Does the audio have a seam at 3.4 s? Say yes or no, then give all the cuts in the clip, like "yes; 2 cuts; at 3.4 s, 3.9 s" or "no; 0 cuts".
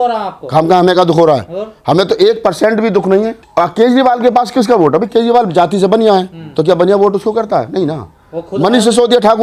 yes; 1 cut; at 3.4 s